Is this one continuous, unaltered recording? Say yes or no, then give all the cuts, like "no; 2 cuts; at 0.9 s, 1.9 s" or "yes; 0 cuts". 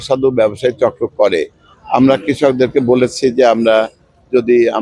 yes; 0 cuts